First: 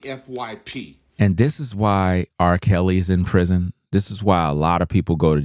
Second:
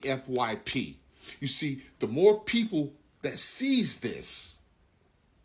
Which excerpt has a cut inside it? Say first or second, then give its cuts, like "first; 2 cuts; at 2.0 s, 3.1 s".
second; 1 cut; at 1.0 s